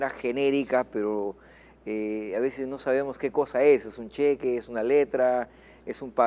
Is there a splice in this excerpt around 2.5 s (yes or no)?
no